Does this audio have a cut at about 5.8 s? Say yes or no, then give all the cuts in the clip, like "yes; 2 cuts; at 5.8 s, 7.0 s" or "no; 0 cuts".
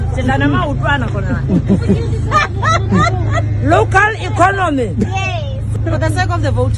yes; 1 cut; at 5.8 s